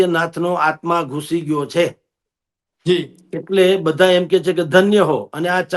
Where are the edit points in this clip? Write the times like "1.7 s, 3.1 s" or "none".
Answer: none